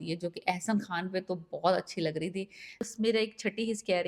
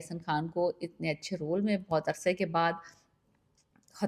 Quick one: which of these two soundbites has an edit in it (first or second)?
first